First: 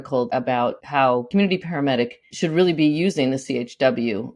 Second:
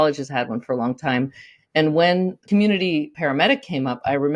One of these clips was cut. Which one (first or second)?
second